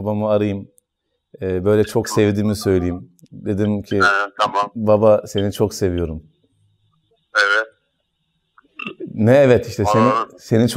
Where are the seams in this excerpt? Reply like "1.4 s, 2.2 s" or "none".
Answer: none